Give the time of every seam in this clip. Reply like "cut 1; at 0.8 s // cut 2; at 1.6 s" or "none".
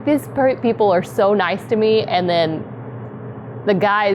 none